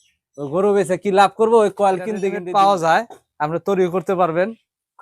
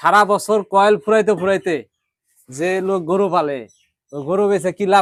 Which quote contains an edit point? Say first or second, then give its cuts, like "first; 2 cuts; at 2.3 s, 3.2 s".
first; 1 cut; at 2.3 s